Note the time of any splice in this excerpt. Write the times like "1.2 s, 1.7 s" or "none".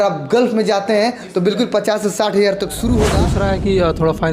3.2 s